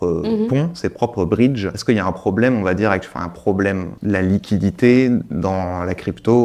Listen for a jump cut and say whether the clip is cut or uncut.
cut